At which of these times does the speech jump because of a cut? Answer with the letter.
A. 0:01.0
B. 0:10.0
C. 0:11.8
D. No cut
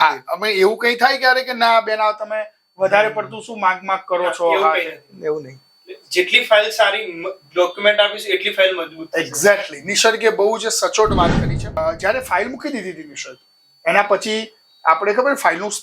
C